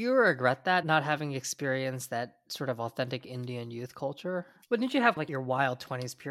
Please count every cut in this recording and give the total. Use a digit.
3